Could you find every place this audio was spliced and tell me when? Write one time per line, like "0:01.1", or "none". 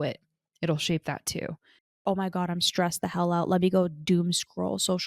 0:01.9